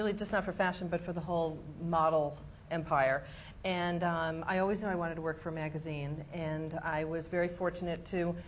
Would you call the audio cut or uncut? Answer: cut